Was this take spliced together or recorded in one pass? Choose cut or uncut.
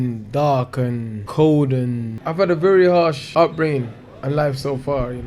cut